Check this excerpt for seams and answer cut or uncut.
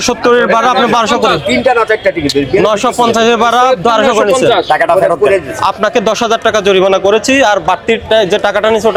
uncut